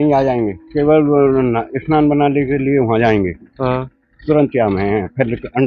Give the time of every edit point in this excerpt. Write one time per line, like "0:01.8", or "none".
none